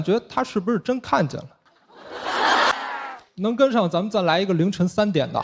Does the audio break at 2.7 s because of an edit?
yes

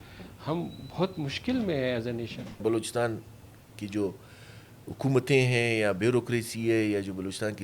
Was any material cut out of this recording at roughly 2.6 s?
yes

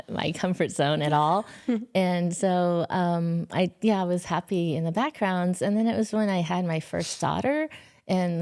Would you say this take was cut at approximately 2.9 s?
no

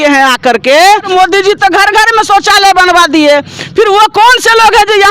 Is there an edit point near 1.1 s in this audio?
yes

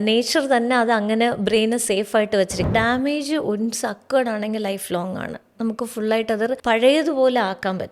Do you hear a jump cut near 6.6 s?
yes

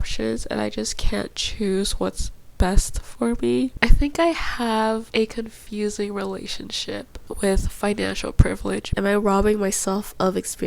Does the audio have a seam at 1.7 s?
no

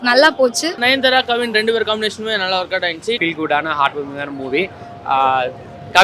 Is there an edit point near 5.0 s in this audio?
no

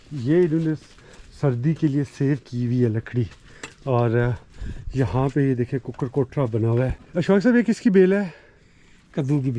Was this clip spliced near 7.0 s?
yes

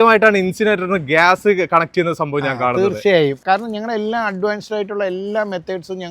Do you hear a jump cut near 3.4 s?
no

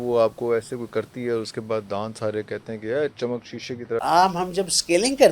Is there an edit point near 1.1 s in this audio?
no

